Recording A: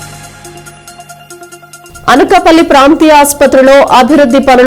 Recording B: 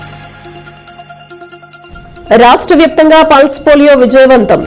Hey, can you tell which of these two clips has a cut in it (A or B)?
B